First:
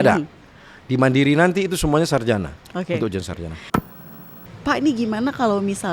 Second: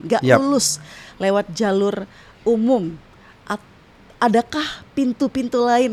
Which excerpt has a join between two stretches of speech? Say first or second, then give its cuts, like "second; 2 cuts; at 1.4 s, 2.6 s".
first; 1 cut; at 4.0 s